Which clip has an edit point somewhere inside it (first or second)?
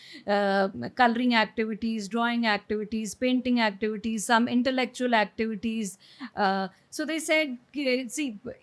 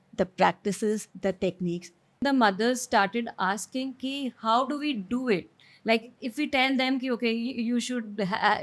second